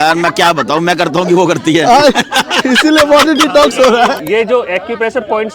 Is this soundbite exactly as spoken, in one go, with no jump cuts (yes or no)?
no